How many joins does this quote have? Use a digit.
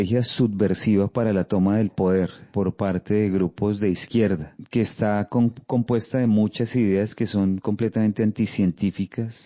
2